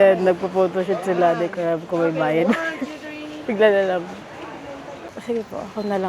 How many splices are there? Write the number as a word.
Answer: one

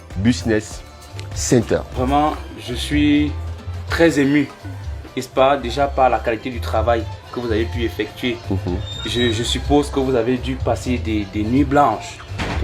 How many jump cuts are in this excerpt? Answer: one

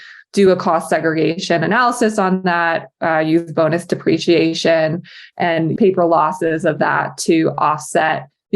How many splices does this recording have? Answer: one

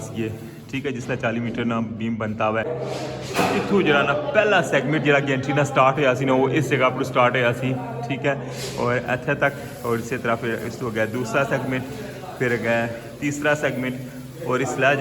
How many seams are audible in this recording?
one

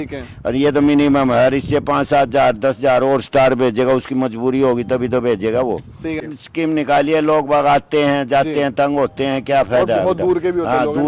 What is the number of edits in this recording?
one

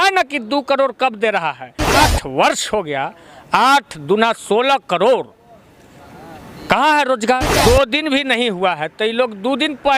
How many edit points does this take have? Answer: two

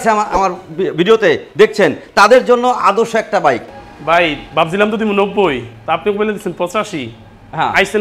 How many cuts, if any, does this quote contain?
one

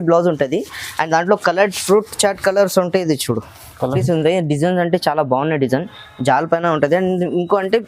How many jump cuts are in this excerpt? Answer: one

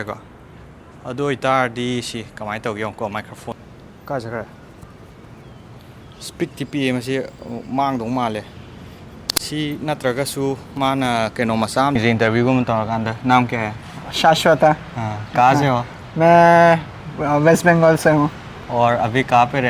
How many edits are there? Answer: two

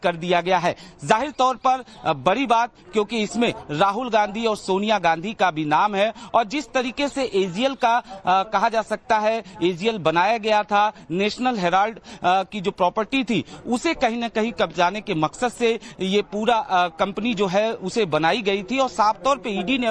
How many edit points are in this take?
zero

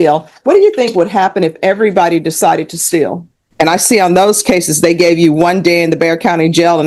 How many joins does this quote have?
one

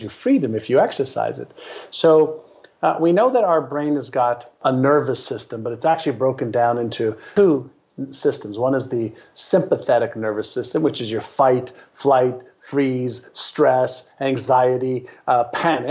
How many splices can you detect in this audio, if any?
two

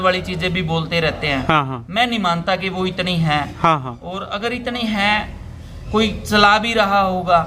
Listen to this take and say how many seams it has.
zero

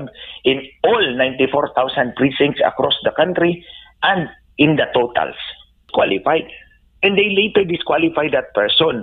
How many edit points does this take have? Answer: one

